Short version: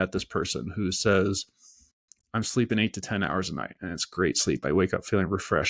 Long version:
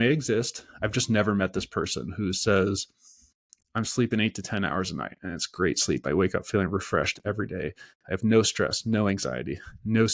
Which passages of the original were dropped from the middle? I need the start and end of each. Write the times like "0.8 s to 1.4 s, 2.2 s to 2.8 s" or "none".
none